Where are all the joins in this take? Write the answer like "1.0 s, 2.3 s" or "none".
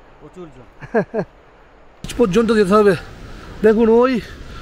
2.1 s